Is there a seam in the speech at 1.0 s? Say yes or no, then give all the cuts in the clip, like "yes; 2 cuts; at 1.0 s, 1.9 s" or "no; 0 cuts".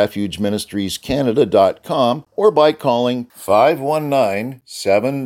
no; 1 cut; at 2.3 s